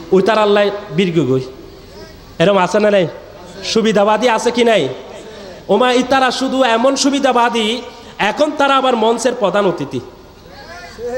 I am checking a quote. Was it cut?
no; 0 cuts

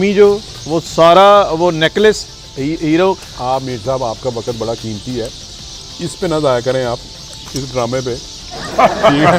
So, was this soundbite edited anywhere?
no; 0 cuts

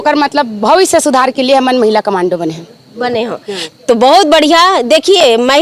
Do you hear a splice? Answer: no; 0 cuts

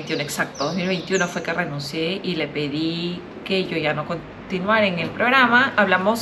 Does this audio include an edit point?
no; 0 cuts

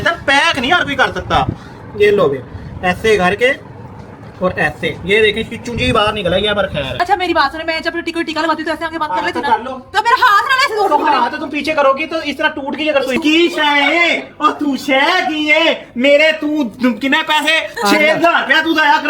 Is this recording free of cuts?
no; 2 cuts; at 7.0 s, 13.2 s

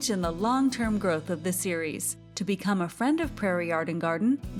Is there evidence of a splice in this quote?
no; 0 cuts

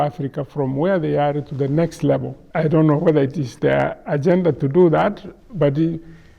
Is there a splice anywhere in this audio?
yes; 1 cut; at 2.4 s

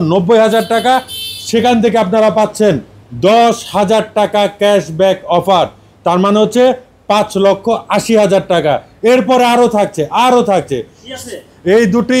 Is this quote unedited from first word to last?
yes; 0 cuts

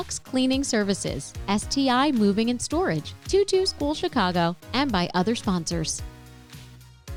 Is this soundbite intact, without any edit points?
yes; 0 cuts

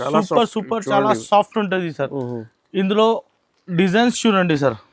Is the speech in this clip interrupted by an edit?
no; 0 cuts

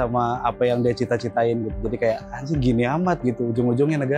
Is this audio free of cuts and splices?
yes; 0 cuts

